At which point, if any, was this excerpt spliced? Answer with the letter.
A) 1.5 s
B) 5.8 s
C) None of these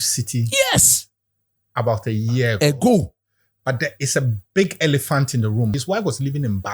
B